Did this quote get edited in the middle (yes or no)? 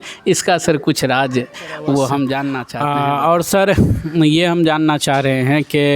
yes